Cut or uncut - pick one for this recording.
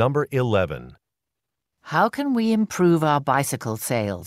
uncut